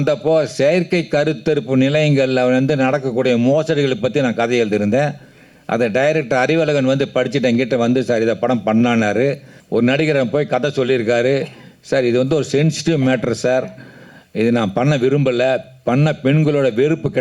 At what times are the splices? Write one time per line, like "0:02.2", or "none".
0:09.5